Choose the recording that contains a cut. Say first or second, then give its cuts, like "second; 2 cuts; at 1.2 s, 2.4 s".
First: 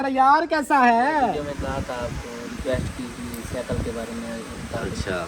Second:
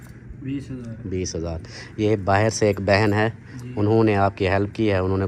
first; 1 cut; at 1.5 s